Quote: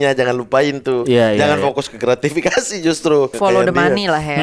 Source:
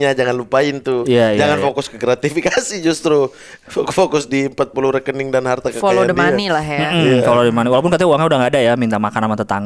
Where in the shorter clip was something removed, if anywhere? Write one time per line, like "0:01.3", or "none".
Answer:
0:03.3